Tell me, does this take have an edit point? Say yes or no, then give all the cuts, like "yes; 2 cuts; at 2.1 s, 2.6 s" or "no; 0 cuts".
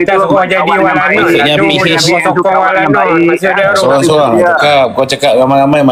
no; 0 cuts